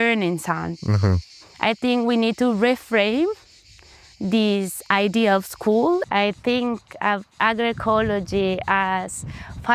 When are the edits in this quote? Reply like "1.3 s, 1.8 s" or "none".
6.0 s, 7.3 s